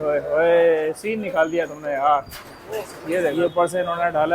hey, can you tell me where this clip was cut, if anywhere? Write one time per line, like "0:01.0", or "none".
0:03.3